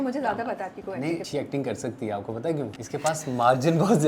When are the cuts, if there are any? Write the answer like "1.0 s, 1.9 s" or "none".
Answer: 1.2 s, 2.8 s